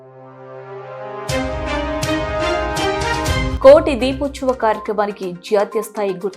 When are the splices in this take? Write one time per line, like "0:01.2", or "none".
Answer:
0:03.5